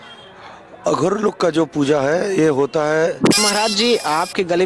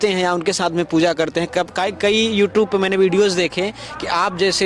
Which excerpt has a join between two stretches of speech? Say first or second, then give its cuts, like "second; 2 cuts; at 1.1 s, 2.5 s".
first; 1 cut; at 3.4 s